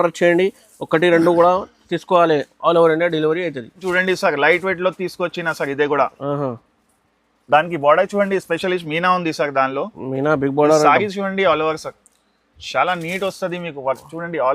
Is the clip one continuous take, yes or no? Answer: yes